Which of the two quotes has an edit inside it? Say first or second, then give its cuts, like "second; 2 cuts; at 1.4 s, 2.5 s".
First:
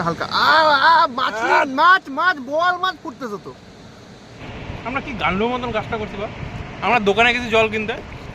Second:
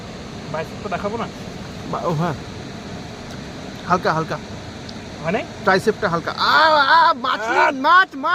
first; 1 cut; at 4.4 s